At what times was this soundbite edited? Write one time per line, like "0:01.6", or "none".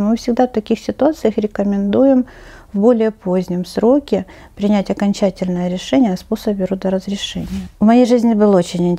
0:07.6